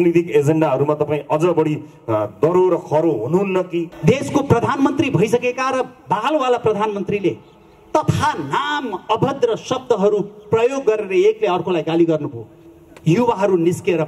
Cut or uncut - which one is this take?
cut